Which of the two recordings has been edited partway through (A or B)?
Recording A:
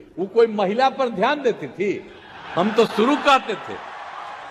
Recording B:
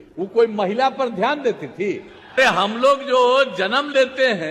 B